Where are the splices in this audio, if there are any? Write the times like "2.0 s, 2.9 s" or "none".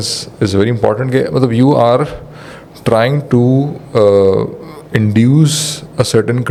none